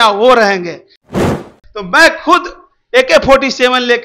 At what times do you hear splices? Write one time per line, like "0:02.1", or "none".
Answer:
0:01.2